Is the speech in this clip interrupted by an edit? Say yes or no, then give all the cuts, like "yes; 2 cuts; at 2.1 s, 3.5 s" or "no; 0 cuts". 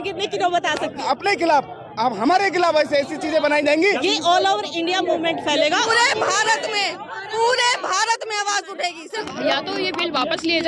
yes; 4 cuts; at 1.0 s, 4.0 s, 5.9 s, 9.3 s